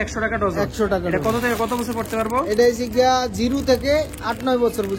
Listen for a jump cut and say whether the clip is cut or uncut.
uncut